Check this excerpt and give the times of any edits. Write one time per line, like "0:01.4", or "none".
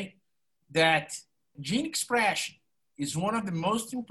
0:01.6